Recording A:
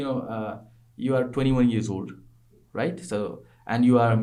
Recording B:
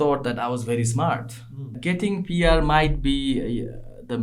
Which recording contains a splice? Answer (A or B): B